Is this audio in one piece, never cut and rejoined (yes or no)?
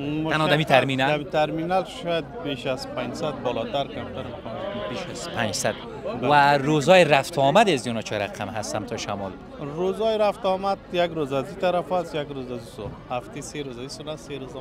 yes